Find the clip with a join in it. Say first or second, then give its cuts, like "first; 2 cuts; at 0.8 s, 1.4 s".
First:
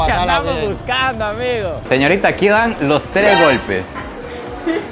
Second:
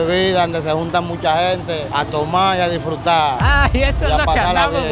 first; 1 cut; at 1.8 s